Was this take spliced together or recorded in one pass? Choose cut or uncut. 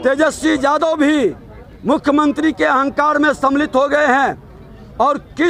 uncut